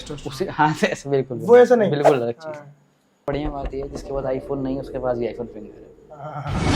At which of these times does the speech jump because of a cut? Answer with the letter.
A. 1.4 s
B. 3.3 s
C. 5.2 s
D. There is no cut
B